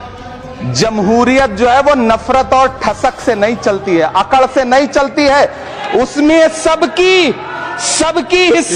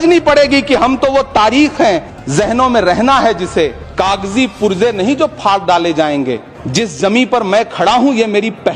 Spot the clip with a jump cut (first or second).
second